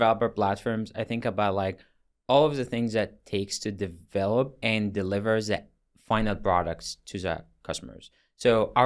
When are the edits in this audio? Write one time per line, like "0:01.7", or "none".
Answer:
0:04.5